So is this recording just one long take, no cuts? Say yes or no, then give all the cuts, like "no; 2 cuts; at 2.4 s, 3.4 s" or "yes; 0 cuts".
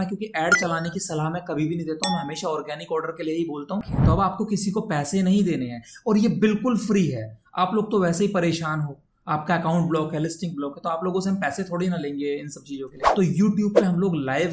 no; 2 cuts; at 3.9 s, 13.0 s